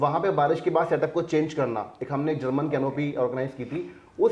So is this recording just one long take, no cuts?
yes; 0 cuts

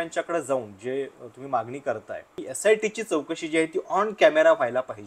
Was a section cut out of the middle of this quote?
yes; 1 cut; at 2.4 s

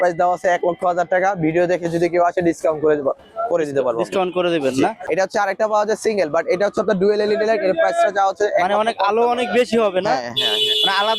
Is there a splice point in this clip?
yes; 1 cut; at 5.0 s

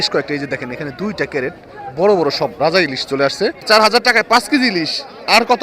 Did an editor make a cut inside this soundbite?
yes; 1 cut; at 3.6 s

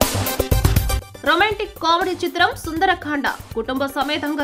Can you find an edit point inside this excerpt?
yes; 1 cut; at 1.1 s

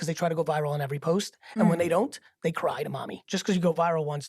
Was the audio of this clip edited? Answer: yes; 1 cut; at 3.2 s

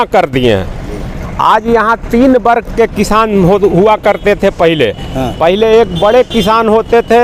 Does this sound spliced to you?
no; 0 cuts

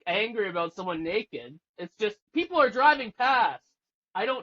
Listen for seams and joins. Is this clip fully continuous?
no; 1 cut; at 2.2 s

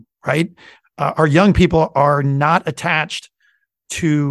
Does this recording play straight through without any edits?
yes; 0 cuts

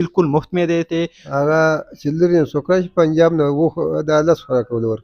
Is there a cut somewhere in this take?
yes; 1 cut; at 1.2 s

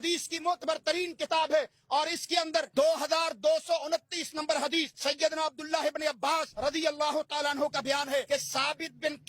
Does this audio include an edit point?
yes; 4 cuts; at 2.7 s, 4.9 s, 6.5 s, 8.2 s

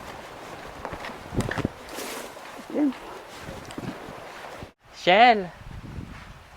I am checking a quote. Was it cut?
yes; 1 cut; at 4.7 s

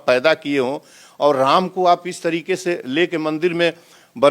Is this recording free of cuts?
yes; 0 cuts

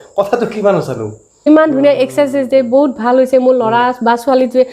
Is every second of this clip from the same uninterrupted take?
no; 1 cut; at 1.5 s

